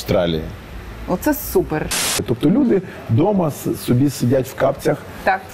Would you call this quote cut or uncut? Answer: cut